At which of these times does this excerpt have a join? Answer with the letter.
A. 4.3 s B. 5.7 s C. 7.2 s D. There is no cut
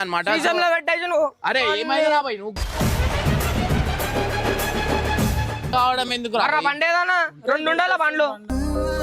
B